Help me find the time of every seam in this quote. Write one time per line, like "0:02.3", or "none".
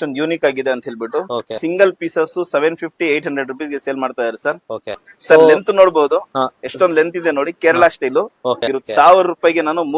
0:01.6
0:05.1
0:08.7

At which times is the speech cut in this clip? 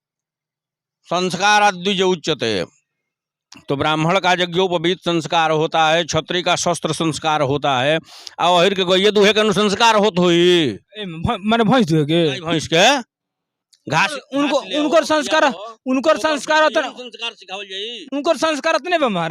none

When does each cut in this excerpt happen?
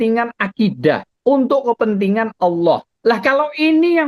0:01.1
0:02.9

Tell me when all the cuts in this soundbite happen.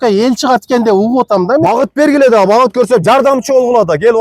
0:01.6

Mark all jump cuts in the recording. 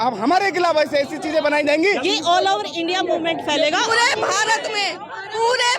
0:02.0
0:03.9

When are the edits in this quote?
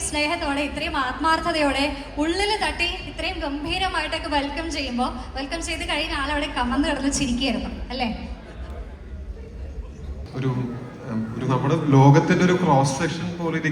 0:10.2

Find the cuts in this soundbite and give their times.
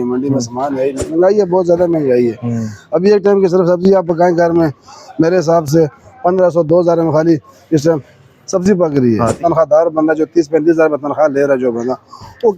0:01.0
0:09.4

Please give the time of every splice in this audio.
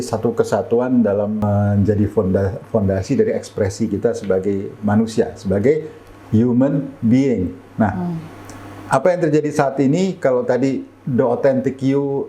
0:01.4

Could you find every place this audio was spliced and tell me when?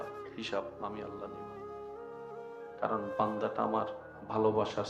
none

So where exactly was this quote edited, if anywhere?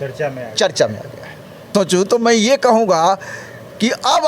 0:01.5

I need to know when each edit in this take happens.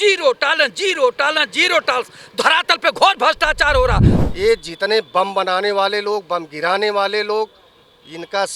0:04.1

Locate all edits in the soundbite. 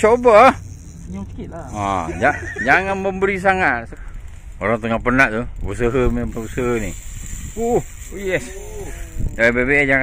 0:03.9

